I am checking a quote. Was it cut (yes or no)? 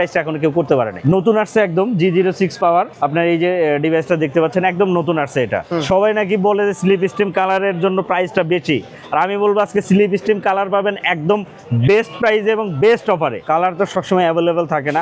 yes